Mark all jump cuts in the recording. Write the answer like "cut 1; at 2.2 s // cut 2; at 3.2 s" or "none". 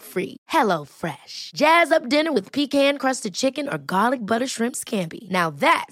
none

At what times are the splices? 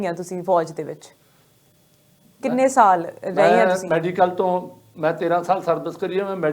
none

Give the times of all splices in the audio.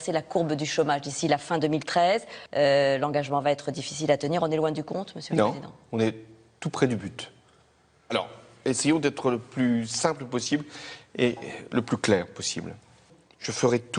none

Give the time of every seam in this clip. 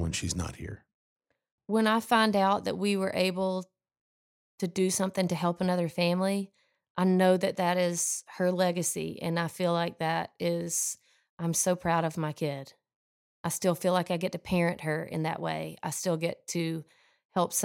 cut 1; at 1.5 s

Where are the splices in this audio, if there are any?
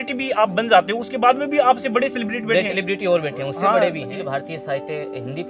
cut 1; at 4.1 s

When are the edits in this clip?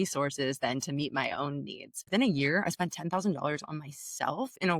cut 1; at 2.1 s

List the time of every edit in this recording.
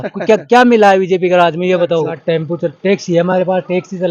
cut 1; at 2.2 s

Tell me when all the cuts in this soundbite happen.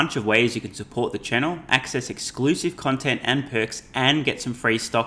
none

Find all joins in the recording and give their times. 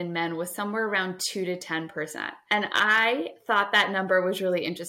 cut 1; at 2.3 s

